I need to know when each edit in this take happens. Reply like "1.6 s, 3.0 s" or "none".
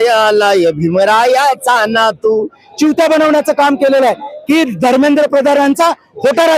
2.6 s